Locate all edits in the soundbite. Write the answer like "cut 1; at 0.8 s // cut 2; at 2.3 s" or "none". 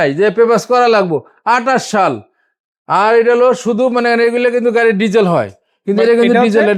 none